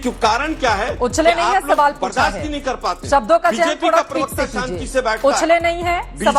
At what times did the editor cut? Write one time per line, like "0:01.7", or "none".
none